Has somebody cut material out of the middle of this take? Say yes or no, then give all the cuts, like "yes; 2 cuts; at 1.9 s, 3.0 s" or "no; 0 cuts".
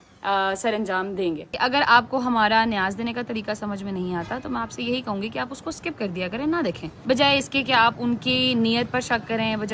yes; 2 cuts; at 1.6 s, 6.9 s